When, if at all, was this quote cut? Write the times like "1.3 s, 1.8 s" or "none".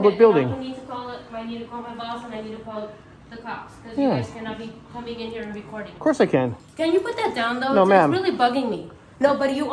6.8 s

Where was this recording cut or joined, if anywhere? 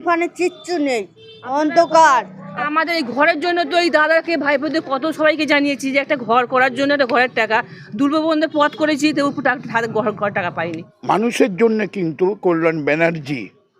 2.7 s, 10.9 s

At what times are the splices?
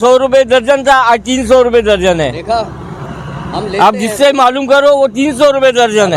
none

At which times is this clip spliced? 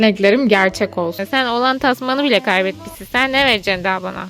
1.2 s

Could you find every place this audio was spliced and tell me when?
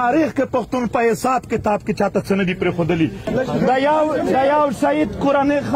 3.3 s

